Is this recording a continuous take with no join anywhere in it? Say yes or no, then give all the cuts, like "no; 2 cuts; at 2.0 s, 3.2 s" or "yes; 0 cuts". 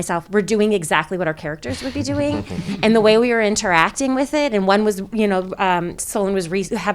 yes; 0 cuts